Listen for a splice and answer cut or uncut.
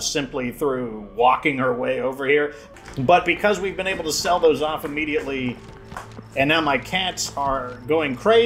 cut